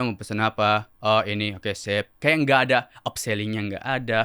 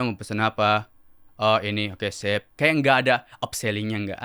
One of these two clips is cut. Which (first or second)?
first